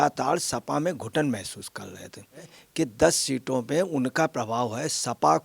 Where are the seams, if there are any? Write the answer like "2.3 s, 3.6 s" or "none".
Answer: 2.6 s